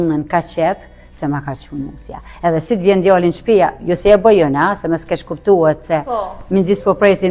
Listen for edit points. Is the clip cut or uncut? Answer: uncut